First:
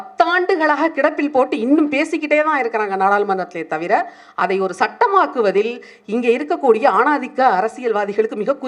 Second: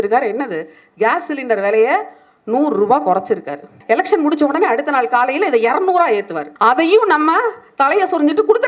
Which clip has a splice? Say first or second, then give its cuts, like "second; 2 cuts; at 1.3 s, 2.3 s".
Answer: second; 2 cuts; at 3.7 s, 6.4 s